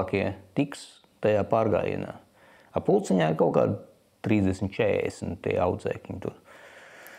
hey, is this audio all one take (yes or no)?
yes